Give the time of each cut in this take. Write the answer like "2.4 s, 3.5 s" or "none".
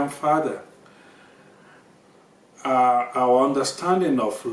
none